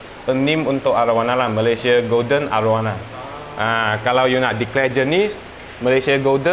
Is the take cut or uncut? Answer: uncut